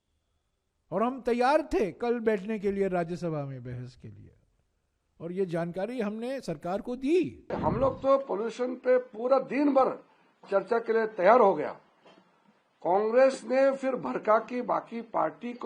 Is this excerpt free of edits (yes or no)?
no